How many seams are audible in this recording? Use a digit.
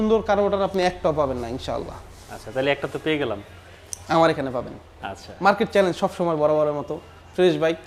0